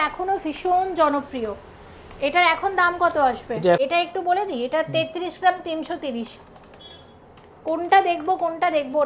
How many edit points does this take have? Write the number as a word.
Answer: one